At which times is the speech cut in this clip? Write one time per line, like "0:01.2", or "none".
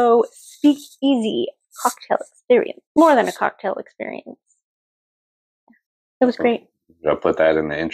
0:02.8